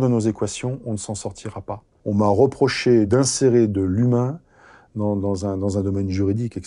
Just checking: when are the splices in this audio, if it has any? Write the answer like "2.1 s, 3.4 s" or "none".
1.9 s, 3.1 s